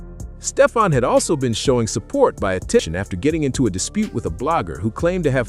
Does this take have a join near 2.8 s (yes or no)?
yes